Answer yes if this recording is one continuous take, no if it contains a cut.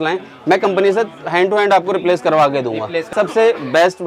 no